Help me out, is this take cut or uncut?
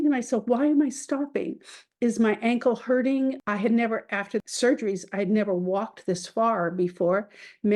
cut